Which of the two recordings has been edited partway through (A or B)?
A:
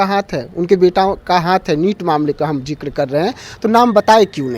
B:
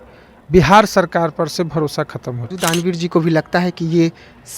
B